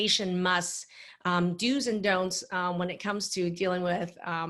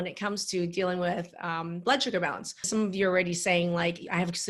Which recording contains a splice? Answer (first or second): second